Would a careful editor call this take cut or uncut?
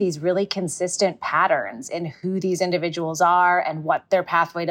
uncut